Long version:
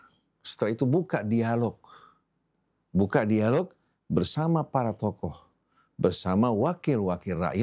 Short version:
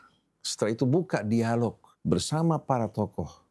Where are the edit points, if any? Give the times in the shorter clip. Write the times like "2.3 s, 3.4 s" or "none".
1.9 s